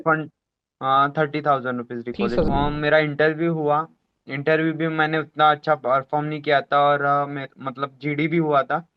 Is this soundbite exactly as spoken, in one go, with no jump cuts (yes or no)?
no